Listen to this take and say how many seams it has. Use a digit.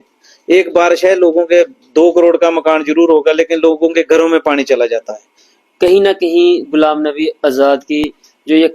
1